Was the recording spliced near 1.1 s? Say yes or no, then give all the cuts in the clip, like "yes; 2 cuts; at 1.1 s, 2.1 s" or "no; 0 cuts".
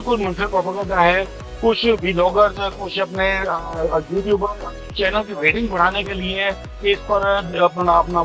no; 0 cuts